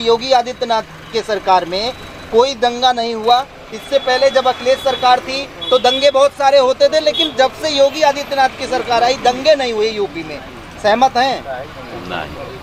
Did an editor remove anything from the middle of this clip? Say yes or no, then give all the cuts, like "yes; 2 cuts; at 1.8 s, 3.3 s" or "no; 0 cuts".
no; 0 cuts